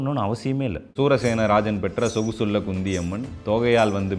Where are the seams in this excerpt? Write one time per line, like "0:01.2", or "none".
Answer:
0:00.9